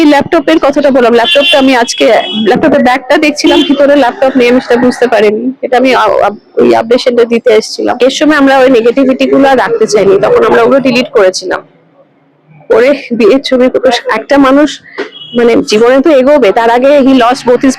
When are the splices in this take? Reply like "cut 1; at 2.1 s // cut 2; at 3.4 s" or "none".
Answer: cut 1; at 8.0 s